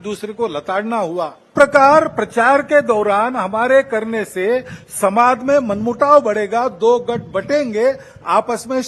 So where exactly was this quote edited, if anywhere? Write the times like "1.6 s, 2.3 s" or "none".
1.5 s